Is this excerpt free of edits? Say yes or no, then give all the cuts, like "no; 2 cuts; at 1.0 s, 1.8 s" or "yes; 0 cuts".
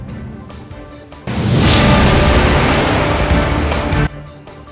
yes; 0 cuts